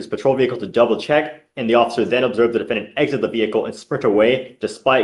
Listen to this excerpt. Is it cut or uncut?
uncut